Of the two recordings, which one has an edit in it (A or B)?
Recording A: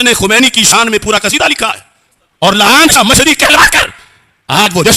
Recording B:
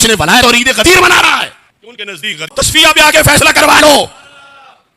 B